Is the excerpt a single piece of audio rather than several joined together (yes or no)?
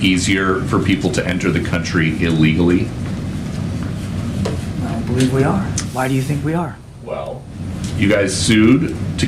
no